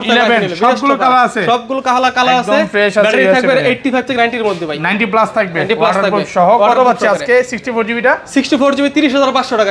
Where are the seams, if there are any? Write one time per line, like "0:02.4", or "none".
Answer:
none

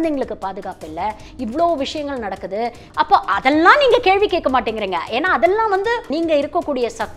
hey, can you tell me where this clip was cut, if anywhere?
0:01.3
0:02.8
0:06.1

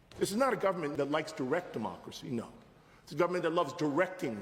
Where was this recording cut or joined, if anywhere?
0:00.9

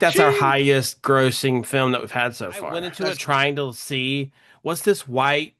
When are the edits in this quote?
0:02.9

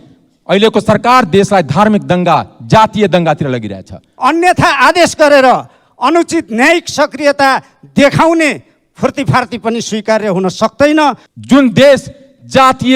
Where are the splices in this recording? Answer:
0:04.1
0:11.3

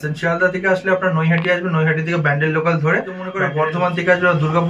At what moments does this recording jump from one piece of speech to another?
0:03.4

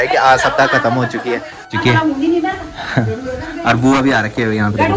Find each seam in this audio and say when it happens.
none

